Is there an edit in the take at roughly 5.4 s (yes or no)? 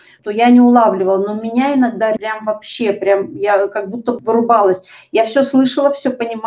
no